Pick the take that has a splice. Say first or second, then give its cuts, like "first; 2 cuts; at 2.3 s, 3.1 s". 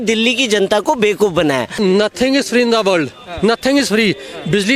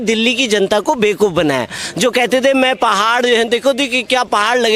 first; 1 cut; at 1.8 s